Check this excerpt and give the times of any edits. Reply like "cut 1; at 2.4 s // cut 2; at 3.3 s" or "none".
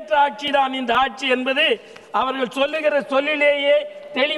none